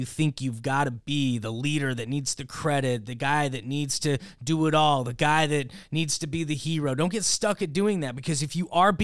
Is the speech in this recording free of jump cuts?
yes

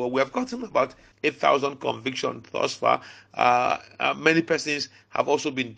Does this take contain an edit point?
yes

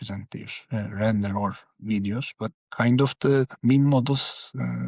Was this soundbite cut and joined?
yes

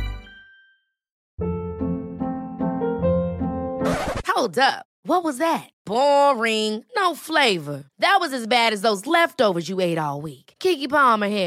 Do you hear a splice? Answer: yes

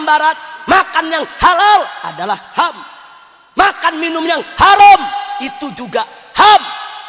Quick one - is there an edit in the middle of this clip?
no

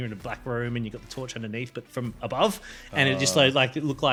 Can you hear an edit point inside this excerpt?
no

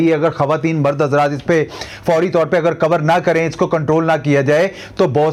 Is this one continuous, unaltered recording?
yes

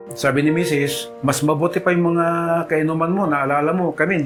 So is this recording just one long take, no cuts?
yes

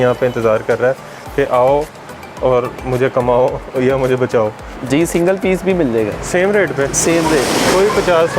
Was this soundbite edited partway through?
yes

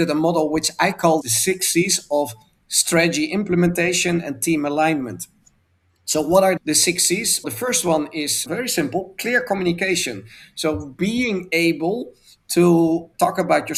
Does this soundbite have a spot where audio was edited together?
no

